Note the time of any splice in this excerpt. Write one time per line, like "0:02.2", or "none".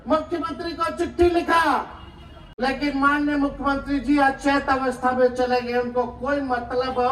none

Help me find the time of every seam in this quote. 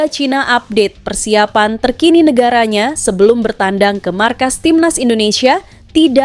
none

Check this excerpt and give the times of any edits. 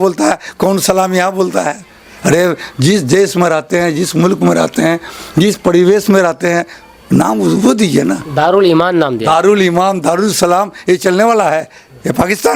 none

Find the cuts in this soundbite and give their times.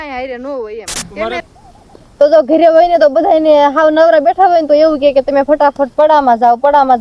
0:01.4

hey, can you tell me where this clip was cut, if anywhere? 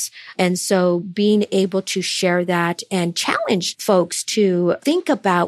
0:03.7

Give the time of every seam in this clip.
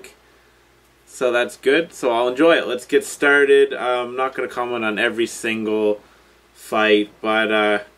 0:06.1

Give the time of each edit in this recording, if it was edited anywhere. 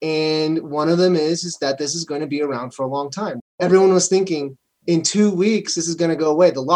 none

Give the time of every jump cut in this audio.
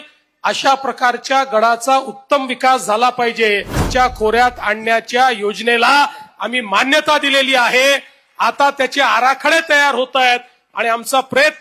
0:03.8

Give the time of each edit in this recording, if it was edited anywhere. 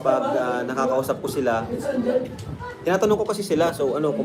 none

